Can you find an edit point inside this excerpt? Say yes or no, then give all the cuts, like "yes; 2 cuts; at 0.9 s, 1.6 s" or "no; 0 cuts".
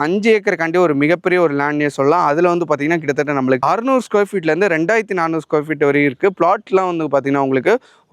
no; 0 cuts